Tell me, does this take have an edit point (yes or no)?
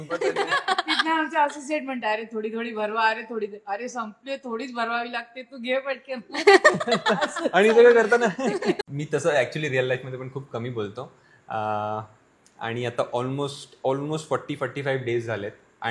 yes